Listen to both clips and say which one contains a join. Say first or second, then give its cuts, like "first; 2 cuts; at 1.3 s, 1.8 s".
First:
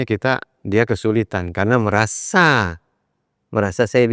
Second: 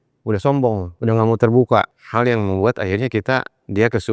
second; 2 cuts; at 0.9 s, 2.0 s